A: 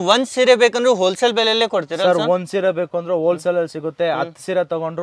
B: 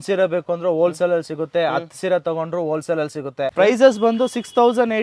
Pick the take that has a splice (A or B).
B